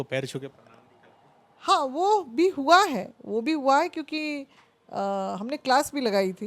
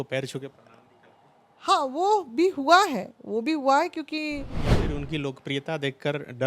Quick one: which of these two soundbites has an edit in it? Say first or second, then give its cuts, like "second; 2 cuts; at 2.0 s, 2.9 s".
second; 1 cut; at 4.8 s